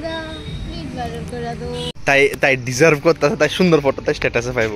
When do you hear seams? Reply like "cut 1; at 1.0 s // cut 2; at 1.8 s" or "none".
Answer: cut 1; at 1.9 s